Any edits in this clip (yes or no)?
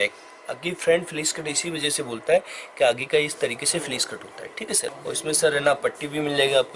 yes